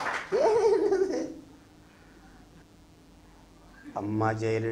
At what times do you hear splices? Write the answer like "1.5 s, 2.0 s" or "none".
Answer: 2.6 s